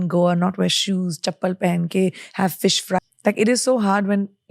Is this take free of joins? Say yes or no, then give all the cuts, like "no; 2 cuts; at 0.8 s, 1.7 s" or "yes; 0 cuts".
no; 1 cut; at 3.0 s